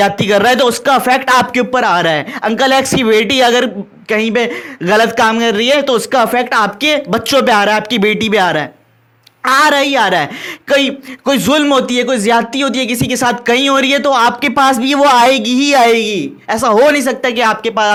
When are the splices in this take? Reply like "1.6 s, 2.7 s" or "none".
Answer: none